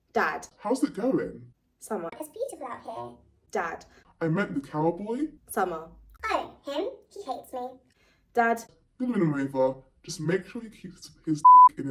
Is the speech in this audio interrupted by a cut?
no; 0 cuts

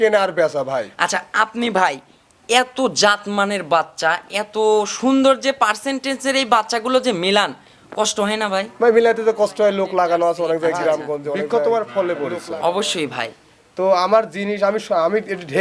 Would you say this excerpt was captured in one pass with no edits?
no; 1 cut; at 11.4 s

